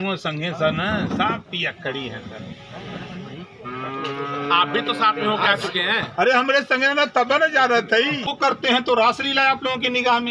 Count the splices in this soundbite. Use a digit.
1